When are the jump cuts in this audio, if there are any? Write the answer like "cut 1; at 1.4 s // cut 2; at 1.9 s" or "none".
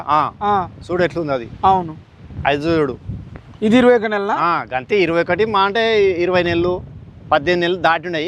none